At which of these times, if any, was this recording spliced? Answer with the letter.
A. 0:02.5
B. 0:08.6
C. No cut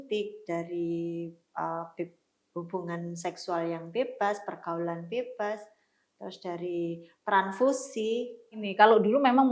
B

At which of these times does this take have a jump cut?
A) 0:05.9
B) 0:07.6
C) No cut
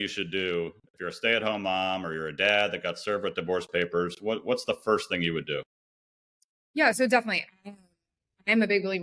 C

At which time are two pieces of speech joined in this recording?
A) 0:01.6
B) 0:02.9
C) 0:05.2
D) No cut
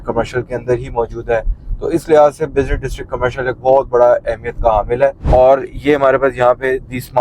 C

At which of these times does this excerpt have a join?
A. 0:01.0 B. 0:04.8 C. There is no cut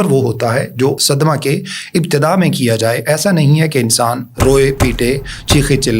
A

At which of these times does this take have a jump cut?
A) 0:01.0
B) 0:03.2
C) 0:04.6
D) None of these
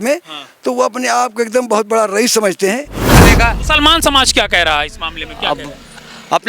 B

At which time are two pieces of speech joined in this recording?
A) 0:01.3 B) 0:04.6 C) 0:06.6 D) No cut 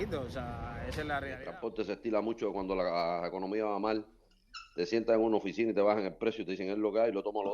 A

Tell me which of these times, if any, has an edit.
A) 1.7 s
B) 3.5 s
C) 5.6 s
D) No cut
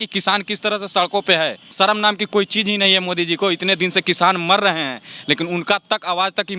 A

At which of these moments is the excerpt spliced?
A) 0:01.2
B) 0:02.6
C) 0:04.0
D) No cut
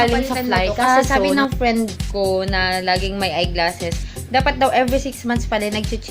A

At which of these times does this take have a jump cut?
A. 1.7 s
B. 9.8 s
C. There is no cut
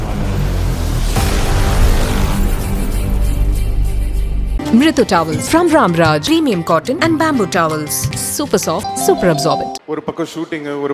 B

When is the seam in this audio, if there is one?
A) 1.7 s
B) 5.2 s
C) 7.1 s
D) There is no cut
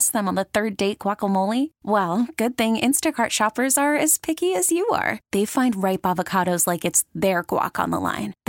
D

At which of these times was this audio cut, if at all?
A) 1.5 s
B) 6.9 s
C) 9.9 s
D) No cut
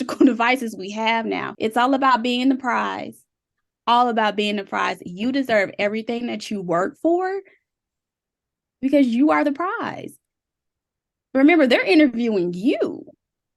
A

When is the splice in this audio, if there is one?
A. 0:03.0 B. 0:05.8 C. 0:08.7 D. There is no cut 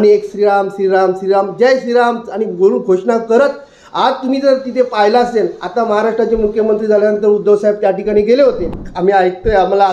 C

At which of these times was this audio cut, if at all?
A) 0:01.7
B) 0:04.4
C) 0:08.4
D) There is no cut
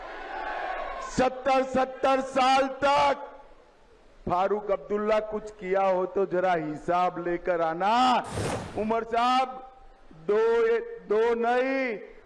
C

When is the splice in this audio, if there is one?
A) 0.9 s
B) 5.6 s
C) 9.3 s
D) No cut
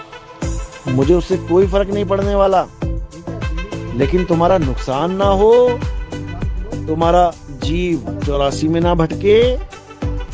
A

